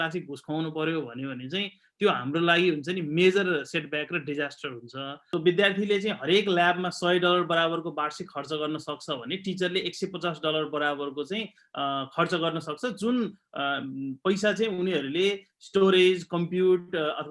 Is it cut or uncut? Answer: cut